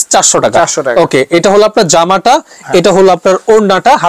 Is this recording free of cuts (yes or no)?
yes